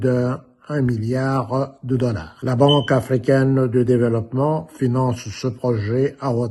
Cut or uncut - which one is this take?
cut